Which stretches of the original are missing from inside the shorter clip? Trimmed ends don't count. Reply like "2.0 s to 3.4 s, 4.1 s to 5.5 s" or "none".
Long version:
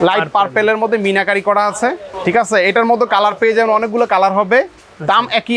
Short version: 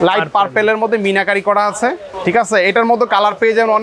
none